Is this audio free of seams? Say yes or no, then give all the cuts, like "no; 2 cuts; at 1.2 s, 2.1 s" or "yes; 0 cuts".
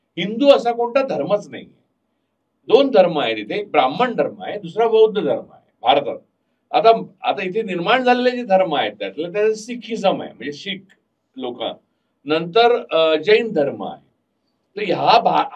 yes; 0 cuts